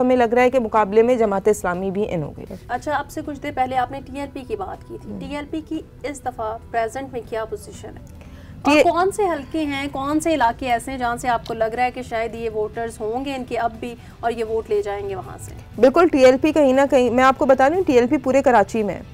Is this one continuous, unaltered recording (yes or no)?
yes